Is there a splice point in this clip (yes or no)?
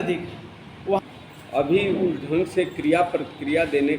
yes